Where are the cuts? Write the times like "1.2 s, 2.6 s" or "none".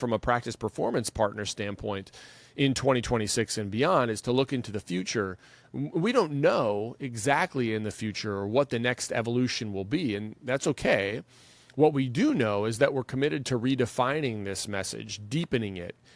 none